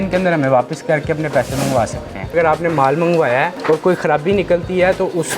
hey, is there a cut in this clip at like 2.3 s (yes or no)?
yes